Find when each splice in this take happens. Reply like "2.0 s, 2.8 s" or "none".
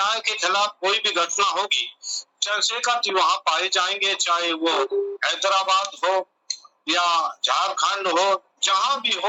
none